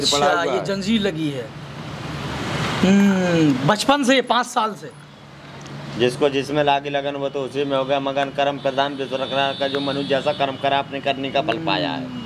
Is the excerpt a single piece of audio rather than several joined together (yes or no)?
yes